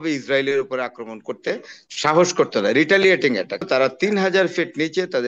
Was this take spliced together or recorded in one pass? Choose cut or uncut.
cut